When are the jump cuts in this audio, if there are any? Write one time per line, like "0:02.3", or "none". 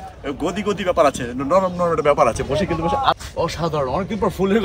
0:03.1

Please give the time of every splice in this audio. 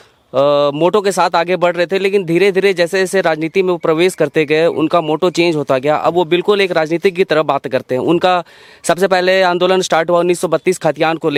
none

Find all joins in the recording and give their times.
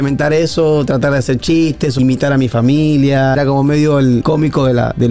0:02.0
0:03.4
0:04.2

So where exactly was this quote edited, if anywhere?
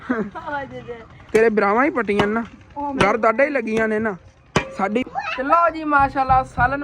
0:01.2
0:05.0

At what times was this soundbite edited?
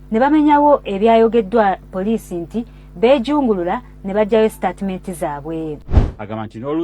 0:05.9

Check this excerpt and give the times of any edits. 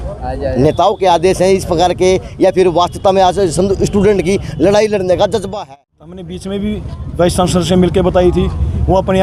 0:05.5

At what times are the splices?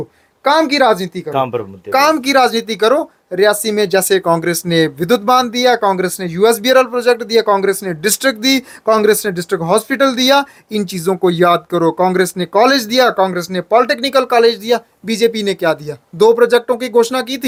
none

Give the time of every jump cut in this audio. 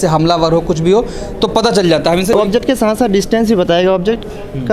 0:02.6

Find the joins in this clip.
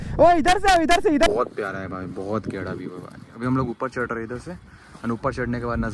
0:01.3

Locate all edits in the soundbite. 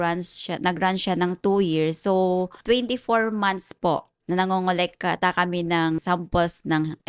0:02.5
0:04.1
0:06.0

